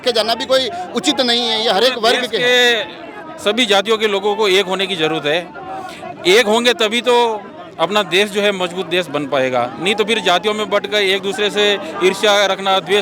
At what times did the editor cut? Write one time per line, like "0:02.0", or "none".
none